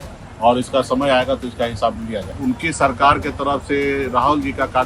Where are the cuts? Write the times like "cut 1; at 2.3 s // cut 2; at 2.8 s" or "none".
cut 1; at 2.3 s